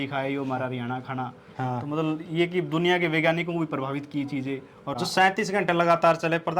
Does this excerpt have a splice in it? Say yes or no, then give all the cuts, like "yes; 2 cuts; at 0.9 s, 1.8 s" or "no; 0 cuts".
yes; 1 cut; at 4.9 s